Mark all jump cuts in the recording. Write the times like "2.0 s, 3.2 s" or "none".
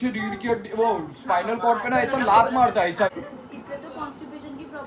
3.1 s